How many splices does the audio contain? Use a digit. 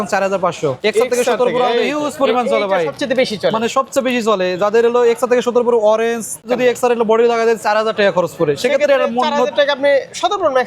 2